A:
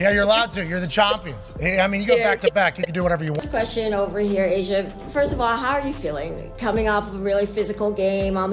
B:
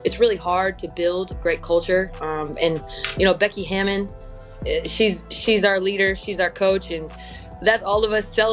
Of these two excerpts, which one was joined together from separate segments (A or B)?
A